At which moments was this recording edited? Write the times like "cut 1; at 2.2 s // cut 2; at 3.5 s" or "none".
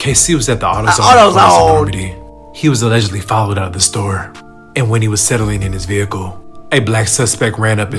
none